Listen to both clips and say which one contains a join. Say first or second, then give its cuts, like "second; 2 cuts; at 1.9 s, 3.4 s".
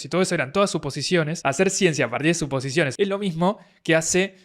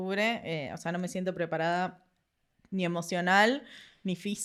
first; 2 cuts; at 1.3 s, 2.9 s